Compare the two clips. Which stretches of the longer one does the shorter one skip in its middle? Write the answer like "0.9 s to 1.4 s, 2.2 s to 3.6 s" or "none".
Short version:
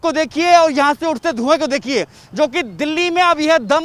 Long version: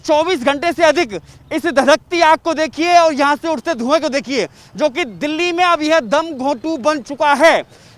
none